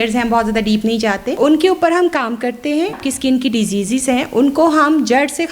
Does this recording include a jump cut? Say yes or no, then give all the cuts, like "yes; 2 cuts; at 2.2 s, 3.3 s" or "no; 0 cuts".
yes; 2 cuts; at 1.3 s, 3.0 s